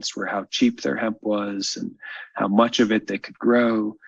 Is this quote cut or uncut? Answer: uncut